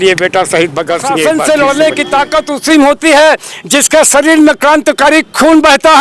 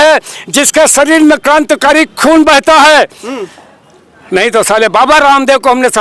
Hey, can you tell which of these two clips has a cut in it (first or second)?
first